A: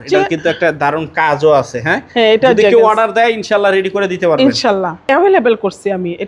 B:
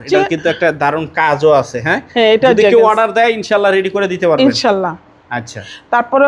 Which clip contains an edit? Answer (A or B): A